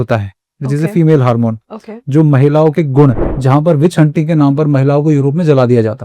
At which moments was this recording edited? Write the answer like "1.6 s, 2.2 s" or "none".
3.3 s